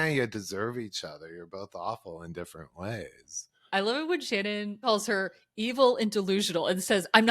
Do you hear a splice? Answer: yes; 2 cuts; at 3.6 s, 4.8 s

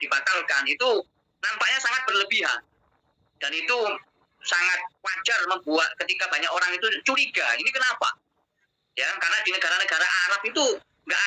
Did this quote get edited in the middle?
no; 0 cuts

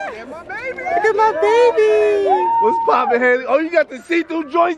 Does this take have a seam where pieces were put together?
no; 0 cuts

